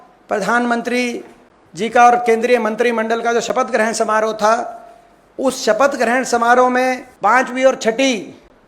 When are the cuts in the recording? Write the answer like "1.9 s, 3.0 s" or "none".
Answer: 7.1 s